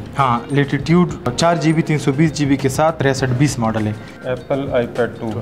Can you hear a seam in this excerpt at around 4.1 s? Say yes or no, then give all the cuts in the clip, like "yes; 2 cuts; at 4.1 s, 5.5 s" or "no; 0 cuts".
yes; 3 cuts; at 1.3 s, 3.0 s, 4.1 s